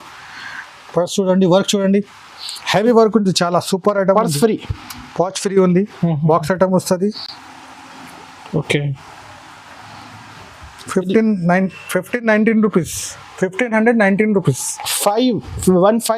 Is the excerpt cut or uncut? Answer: uncut